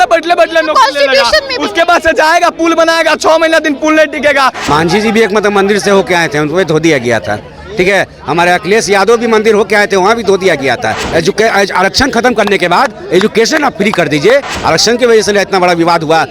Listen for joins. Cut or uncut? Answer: cut